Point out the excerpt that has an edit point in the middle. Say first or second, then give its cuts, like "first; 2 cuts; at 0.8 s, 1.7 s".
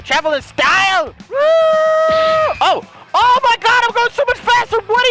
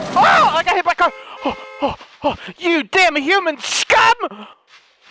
first; 2 cuts; at 1.2 s, 2.6 s